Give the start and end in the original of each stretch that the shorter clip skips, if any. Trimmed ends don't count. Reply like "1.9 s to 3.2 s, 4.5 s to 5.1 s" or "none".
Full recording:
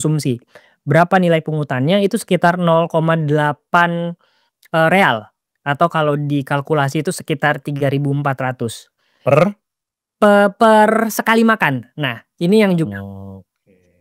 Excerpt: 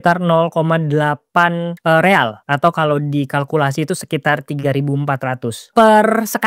4.1 s to 4.6 s, 5.3 s to 5.6 s, 8.9 s to 10.5 s